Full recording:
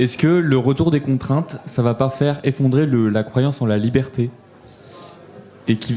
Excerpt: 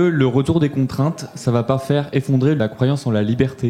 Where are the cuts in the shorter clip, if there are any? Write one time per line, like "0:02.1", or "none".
0:02.6